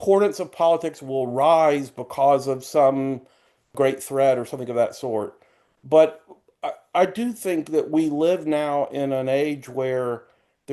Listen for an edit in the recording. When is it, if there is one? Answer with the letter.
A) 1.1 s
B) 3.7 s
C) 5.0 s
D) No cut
B